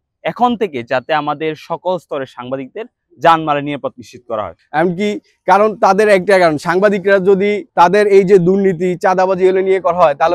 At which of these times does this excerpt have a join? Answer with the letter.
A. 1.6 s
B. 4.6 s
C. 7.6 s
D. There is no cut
B